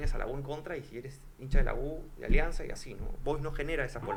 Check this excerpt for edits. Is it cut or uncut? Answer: uncut